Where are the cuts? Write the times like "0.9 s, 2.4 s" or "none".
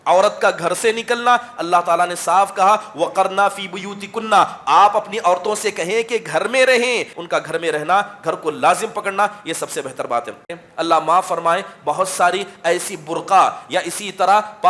7.2 s, 10.5 s

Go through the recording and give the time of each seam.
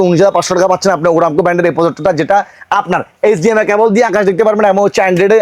none

